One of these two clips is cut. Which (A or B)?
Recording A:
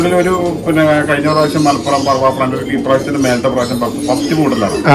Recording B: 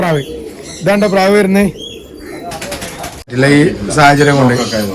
B